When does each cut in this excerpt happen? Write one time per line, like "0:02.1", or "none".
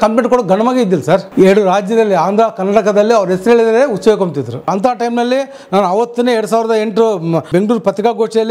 0:01.3
0:04.7
0:07.4